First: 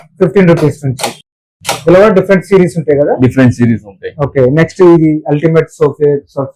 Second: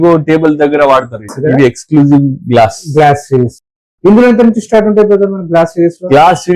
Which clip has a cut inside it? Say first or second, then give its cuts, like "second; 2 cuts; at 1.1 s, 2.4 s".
second; 1 cut; at 1.3 s